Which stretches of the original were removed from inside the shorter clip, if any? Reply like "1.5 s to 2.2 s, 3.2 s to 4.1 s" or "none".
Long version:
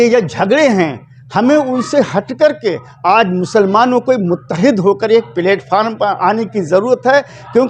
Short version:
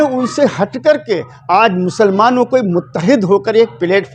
none